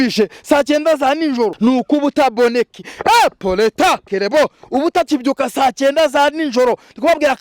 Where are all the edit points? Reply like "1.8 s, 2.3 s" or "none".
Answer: 1.5 s